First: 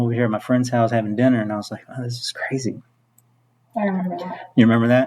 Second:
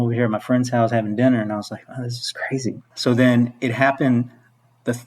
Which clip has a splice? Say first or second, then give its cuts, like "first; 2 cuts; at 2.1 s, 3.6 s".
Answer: second; 1 cut; at 2.9 s